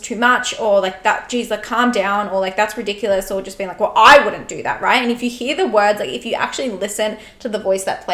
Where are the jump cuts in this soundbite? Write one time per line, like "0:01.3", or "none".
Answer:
none